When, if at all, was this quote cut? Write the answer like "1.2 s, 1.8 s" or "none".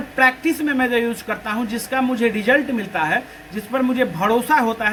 none